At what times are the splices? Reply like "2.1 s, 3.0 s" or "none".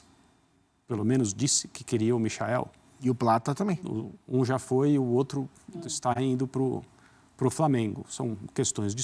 3.8 s